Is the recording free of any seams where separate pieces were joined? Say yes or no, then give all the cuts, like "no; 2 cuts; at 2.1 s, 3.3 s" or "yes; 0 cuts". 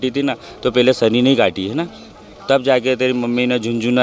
yes; 0 cuts